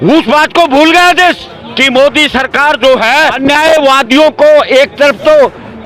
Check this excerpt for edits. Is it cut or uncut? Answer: cut